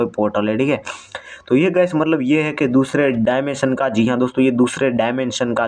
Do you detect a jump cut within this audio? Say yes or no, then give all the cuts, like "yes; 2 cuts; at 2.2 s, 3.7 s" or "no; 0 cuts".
no; 0 cuts